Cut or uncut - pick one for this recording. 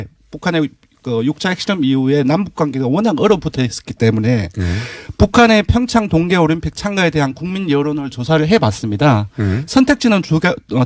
uncut